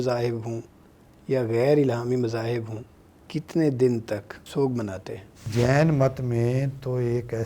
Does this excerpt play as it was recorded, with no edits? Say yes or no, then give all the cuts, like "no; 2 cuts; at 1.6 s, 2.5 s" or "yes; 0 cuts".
no; 2 cuts; at 4.4 s, 5.5 s